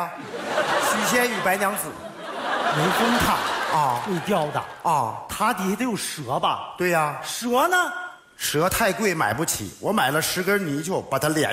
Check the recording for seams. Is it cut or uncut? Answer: uncut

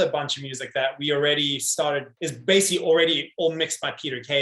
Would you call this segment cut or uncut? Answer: cut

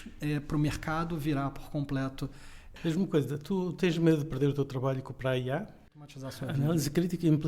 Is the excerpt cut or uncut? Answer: cut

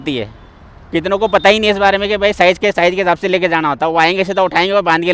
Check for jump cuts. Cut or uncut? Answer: uncut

